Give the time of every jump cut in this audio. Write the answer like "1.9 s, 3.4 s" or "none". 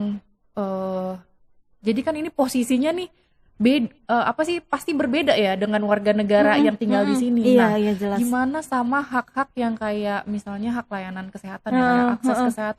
none